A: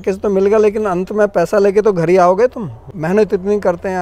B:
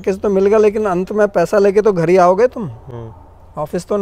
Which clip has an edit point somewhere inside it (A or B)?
A